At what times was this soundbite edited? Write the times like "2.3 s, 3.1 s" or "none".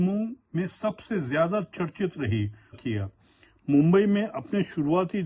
2.8 s

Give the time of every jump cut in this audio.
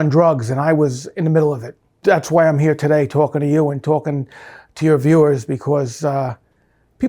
2.0 s

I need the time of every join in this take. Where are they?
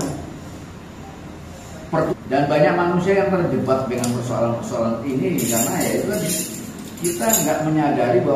2.1 s

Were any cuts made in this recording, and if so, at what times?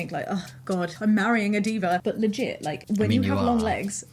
0.9 s

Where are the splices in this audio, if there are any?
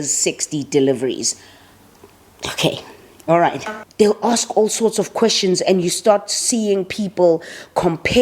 3.5 s

